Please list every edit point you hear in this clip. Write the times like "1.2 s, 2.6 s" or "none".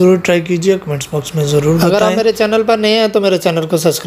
1.9 s